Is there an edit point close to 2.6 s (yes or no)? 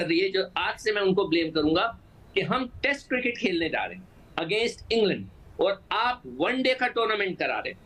no